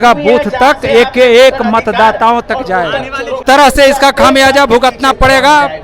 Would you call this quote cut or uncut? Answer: cut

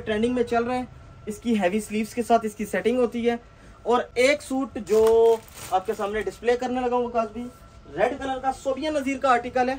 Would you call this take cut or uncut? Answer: uncut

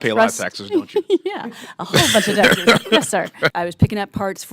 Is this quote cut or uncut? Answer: cut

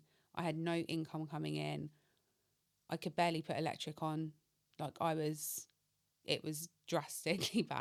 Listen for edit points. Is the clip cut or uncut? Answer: uncut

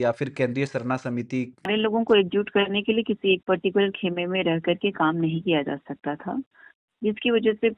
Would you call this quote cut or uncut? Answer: cut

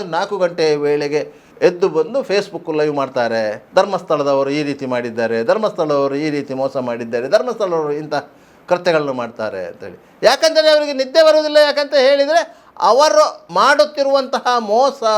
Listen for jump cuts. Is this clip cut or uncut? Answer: cut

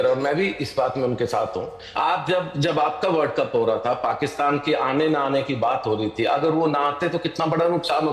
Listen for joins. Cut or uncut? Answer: cut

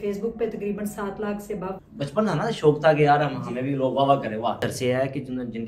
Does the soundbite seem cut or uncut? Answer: cut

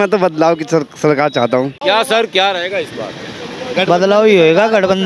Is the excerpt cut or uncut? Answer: cut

